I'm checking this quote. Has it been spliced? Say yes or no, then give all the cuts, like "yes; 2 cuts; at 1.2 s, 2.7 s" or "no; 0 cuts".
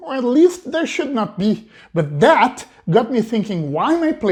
no; 0 cuts